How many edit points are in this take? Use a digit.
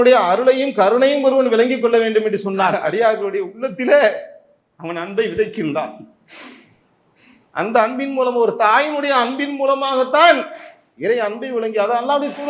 1